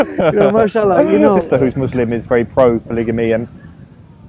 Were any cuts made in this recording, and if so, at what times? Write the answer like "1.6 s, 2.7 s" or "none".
1.4 s